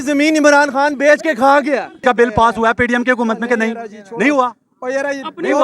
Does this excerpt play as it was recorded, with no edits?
no; 1 cut; at 2.0 s

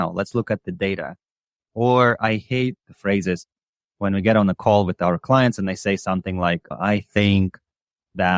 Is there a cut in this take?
no; 0 cuts

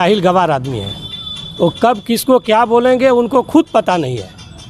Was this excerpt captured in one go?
yes; 0 cuts

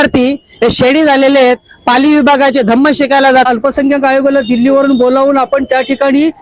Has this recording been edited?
yes; 1 cut; at 3.5 s

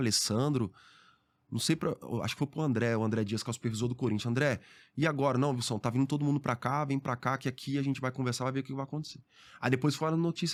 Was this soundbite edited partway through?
no; 0 cuts

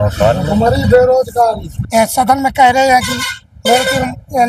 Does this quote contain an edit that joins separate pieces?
yes; 1 cut; at 1.7 s

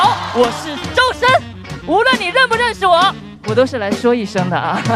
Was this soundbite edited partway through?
yes; 1 cut; at 1.6 s

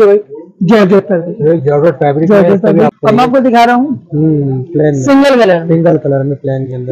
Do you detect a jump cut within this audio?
yes; 1 cut; at 2.9 s

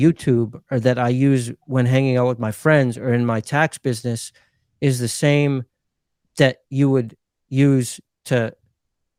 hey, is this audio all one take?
yes; 0 cuts

